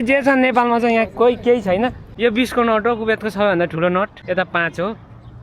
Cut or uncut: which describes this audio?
cut